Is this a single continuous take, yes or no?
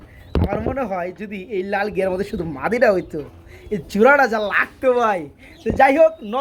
yes